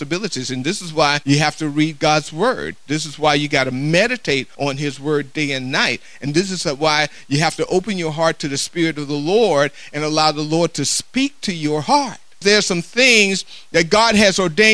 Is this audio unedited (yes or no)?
no